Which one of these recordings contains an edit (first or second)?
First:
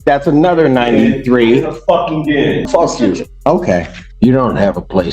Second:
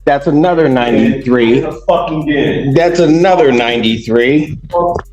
first